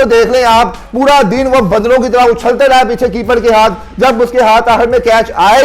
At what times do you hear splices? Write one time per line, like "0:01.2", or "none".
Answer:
none